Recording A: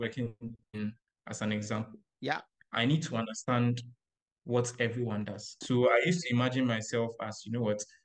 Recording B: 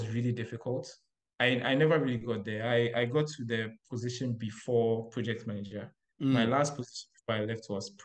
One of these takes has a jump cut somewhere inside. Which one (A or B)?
A